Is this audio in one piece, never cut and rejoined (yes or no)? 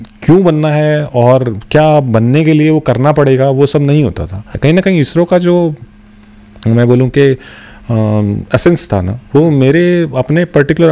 no